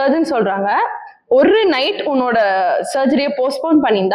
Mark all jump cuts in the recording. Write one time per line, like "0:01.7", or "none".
none